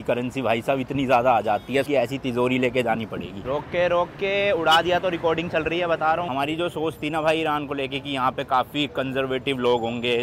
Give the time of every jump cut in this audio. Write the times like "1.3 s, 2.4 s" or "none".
1.9 s, 3.4 s, 6.3 s